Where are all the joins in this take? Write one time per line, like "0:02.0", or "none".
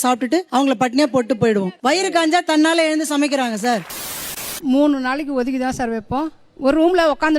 0:01.7
0:03.9